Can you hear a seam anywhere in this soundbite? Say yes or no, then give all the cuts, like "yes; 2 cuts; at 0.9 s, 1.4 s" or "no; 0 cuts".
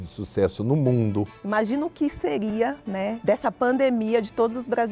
yes; 2 cuts; at 1.4 s, 2.5 s